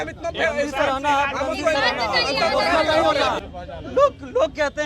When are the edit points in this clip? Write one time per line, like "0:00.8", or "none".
0:03.4